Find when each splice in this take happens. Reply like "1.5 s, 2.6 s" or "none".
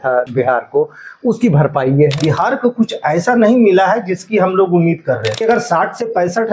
2.2 s, 5.4 s

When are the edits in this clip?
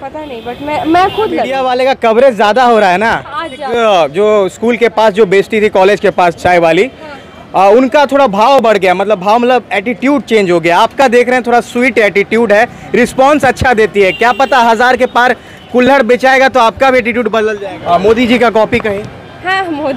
1.6 s, 3.7 s, 17.6 s

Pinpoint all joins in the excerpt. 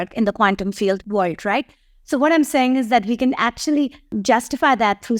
1.0 s, 4.1 s

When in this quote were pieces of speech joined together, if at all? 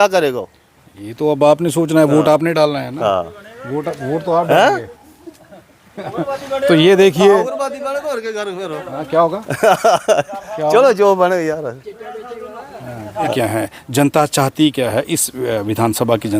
13.3 s

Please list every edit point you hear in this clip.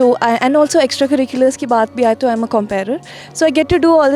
none

